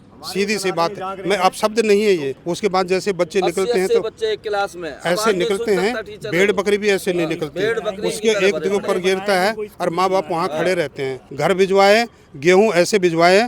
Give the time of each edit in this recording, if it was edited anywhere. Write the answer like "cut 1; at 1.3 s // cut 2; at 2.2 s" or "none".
cut 1; at 2.4 s // cut 2; at 11.2 s